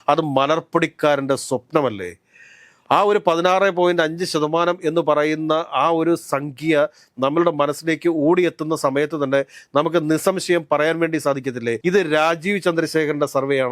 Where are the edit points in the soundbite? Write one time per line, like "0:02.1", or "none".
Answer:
0:11.8

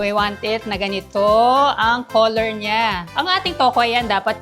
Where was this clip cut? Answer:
0:03.2

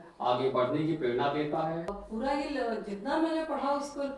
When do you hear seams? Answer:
0:02.0

